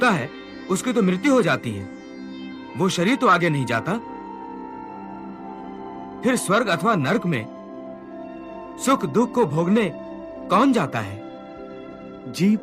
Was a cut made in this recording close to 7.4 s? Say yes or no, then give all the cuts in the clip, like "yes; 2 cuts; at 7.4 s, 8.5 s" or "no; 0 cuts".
no; 2 cuts; at 4.0 s, 6.0 s